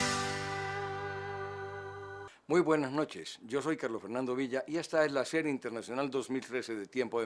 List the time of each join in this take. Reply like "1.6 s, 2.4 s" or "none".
2.2 s